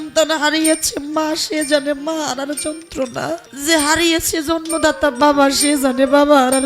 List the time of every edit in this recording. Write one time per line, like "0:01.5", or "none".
0:03.5